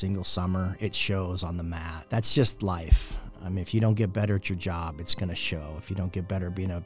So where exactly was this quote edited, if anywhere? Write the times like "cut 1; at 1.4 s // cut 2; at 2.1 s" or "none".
cut 1; at 1.9 s